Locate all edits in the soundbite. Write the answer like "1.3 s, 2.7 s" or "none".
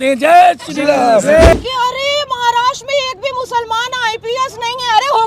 1.5 s